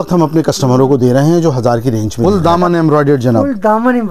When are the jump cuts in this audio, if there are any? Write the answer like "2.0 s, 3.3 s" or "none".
2.3 s